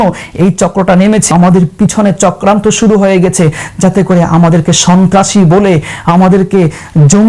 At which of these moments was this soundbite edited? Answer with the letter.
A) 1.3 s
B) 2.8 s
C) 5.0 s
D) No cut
A